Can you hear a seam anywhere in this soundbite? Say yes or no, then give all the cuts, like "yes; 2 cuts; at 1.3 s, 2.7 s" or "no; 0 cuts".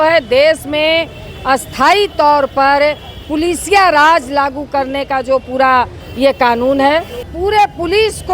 yes; 1 cut; at 7.3 s